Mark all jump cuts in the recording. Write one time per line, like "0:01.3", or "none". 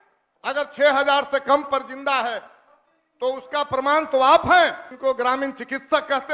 0:04.9